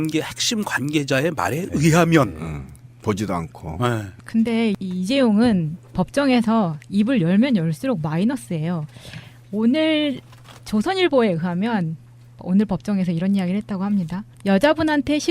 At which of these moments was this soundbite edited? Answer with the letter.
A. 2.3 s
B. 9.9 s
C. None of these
B